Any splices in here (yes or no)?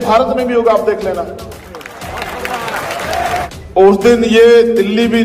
yes